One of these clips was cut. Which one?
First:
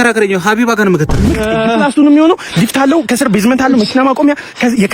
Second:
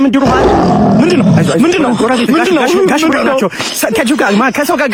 first; 1 cut; at 1.2 s

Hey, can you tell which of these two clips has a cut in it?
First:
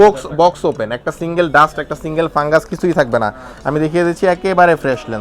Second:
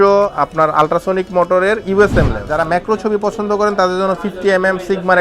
second; 1 cut; at 2.5 s

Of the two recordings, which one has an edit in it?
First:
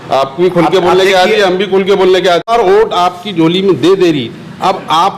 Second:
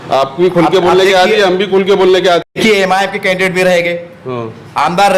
first; 1 cut; at 2.5 s

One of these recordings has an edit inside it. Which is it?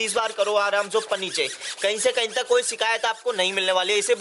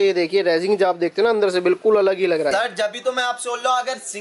second; 1 cut; at 2.5 s

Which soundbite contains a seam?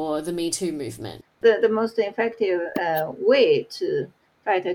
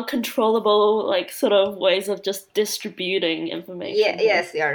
first; 1 cut; at 1.4 s

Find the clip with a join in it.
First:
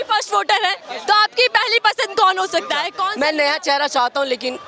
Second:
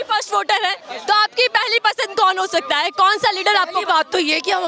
first; 1 cut; at 2.9 s

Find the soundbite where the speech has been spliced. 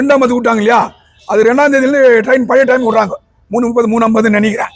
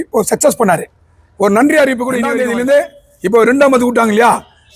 second; 1 cut; at 2.4 s

